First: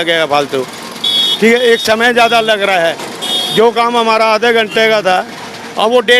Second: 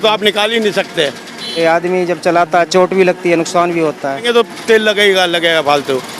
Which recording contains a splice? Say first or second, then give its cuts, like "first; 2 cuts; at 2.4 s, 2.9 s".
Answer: second; 2 cuts; at 1.6 s, 4.2 s